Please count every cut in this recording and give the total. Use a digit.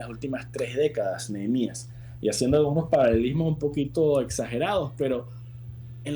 0